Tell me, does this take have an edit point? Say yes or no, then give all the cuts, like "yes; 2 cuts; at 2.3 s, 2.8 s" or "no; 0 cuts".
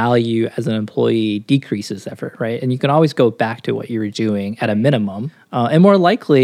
yes; 1 cut; at 5.3 s